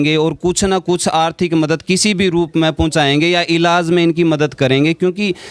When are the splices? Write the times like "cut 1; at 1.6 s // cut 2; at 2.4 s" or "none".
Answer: none